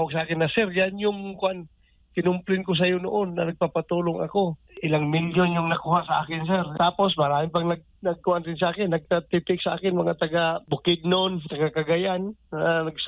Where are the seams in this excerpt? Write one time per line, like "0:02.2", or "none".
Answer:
0:04.7
0:06.7
0:10.6